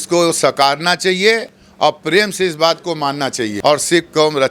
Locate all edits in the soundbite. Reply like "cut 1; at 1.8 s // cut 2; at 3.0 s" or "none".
cut 1; at 3.5 s